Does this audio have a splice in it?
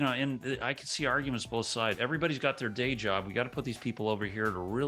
yes; 1 cut; at 2.0 s

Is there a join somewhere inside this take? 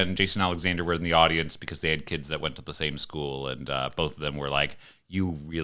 no; 0 cuts

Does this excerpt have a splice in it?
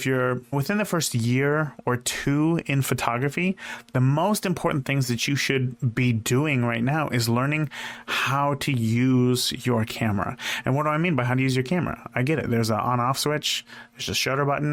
no; 0 cuts

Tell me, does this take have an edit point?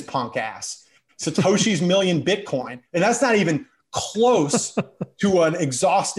yes; 1 cut; at 2.8 s

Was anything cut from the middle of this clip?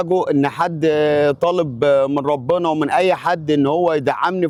no; 0 cuts

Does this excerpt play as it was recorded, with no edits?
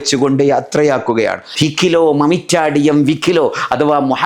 no; 1 cut; at 1.5 s

